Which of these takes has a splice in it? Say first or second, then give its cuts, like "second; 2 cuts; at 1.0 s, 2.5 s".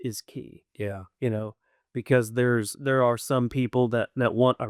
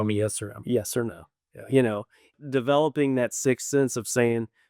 second; 1 cut; at 2.3 s